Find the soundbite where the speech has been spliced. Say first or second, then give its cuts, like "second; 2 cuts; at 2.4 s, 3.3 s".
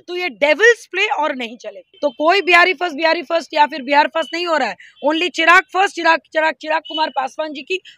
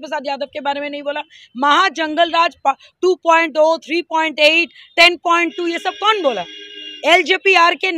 first; 1 cut; at 1.8 s